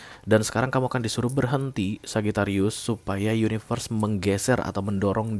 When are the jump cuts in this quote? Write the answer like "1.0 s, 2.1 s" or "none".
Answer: none

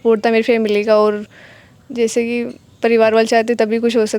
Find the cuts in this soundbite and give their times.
none

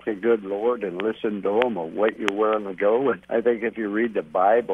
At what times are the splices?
none

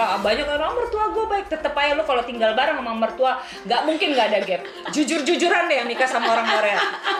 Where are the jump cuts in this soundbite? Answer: none

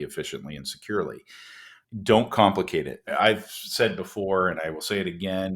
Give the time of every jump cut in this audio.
1.8 s, 3.1 s

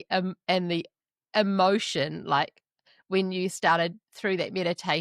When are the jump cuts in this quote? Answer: none

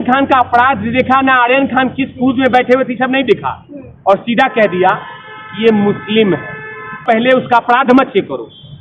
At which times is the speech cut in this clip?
7.0 s

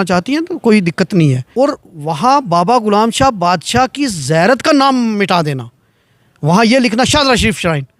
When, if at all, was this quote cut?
1.4 s

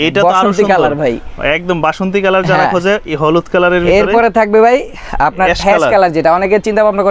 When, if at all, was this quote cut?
none

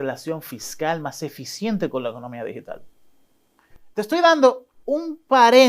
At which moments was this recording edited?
none

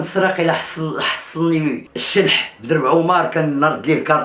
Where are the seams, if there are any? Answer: 1.9 s

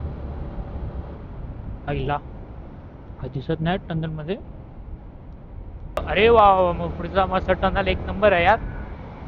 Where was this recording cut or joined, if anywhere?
6.0 s

